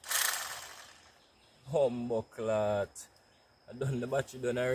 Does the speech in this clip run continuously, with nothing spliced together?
yes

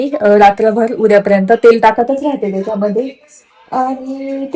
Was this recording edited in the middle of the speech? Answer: no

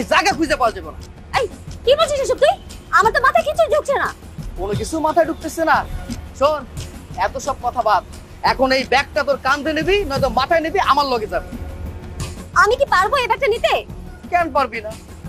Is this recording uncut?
yes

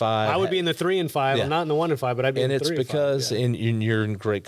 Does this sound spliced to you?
no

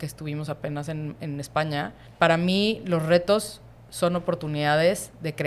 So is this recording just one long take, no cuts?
no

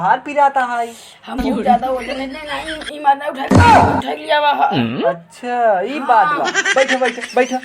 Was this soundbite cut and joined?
yes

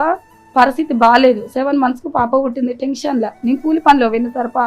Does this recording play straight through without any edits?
yes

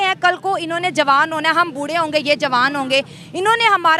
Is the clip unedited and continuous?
yes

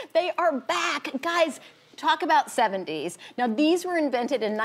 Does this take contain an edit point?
yes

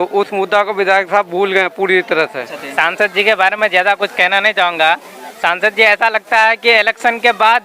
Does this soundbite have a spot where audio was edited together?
yes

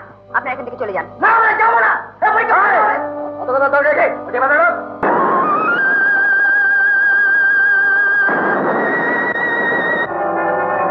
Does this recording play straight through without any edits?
no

